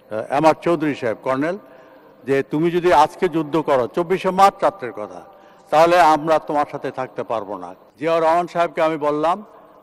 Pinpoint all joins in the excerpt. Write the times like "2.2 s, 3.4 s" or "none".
7.8 s